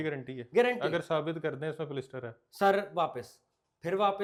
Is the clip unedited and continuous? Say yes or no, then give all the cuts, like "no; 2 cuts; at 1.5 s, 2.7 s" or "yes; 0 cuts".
yes; 0 cuts